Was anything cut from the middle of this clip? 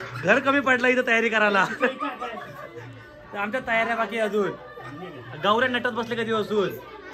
no; 0 cuts

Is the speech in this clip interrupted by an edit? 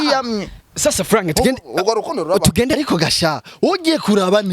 yes; 1 cut; at 2.7 s

